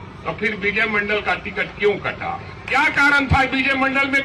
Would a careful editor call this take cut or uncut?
uncut